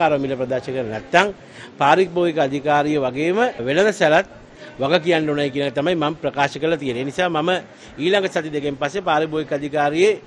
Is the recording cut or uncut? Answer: uncut